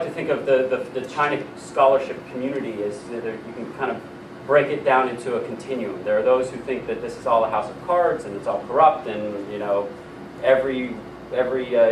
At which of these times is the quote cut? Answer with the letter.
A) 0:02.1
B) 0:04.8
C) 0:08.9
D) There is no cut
B